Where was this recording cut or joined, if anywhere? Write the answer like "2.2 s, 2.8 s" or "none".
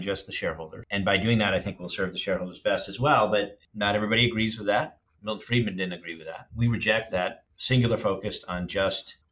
3.6 s